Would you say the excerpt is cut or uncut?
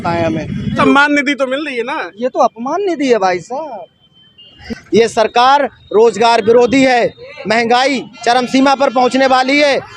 cut